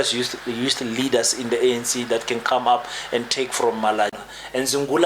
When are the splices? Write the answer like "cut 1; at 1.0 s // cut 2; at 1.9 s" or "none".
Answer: cut 1; at 4.2 s